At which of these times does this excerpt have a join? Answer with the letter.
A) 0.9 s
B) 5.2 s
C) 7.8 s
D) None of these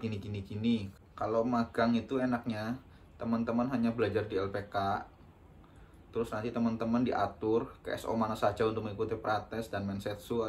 A